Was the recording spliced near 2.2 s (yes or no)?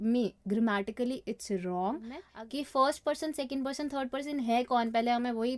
yes